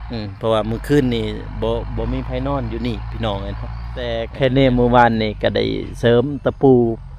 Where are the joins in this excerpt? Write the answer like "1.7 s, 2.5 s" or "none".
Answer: 4.2 s